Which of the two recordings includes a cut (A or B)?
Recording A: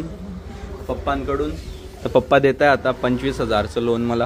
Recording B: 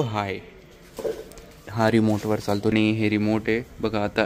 B